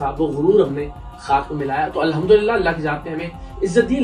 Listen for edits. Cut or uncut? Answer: uncut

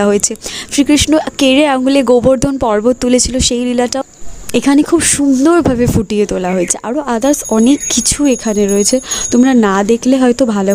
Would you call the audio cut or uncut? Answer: uncut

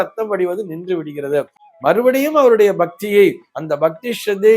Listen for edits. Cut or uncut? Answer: uncut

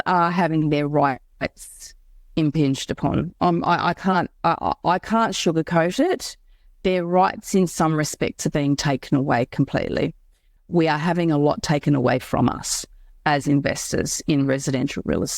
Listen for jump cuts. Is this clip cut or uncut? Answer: cut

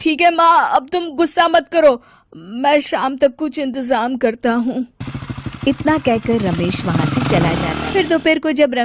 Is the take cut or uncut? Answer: cut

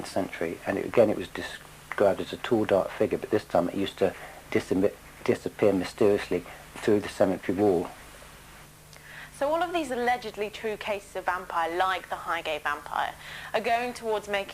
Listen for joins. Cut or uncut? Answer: cut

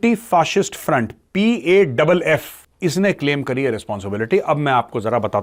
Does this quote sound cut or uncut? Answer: uncut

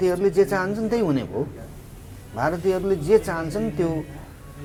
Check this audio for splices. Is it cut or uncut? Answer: uncut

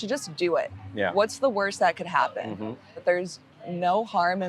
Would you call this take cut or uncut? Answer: cut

